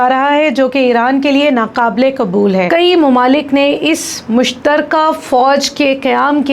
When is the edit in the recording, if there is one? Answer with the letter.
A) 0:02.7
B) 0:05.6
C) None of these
A